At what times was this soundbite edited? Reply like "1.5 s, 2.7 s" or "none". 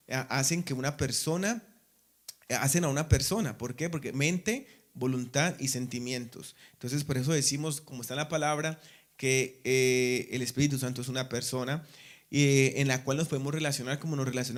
none